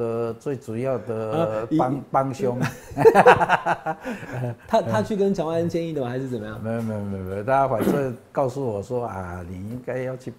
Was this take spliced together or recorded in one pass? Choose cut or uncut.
uncut